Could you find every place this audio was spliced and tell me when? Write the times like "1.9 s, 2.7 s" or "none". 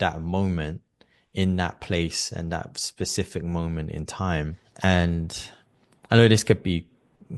4.6 s